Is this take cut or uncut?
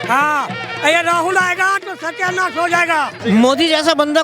cut